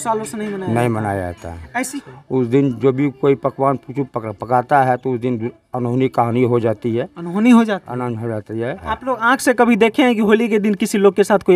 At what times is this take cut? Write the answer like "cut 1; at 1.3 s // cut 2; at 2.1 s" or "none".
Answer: cut 1; at 1.8 s // cut 2; at 8.8 s